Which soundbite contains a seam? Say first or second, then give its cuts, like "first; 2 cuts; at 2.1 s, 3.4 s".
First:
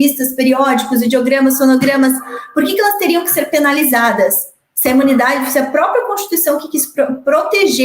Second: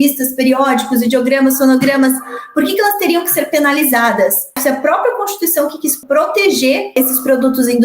second; 3 cuts; at 4.5 s, 6.0 s, 7.0 s